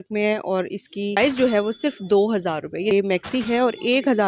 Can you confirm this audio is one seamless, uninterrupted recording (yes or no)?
no